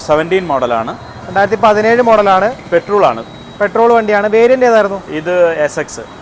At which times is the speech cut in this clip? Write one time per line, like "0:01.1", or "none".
none